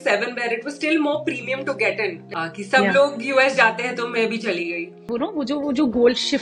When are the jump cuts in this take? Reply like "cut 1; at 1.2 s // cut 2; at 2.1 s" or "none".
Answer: cut 1; at 2.2 s // cut 2; at 4.9 s